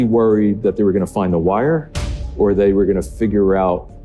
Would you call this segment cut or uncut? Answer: uncut